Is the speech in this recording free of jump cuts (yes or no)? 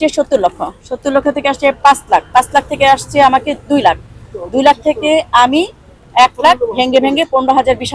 yes